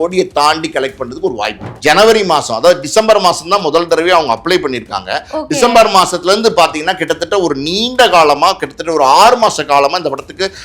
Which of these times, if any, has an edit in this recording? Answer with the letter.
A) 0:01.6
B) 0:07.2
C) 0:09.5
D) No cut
A